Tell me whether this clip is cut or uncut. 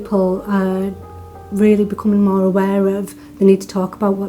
uncut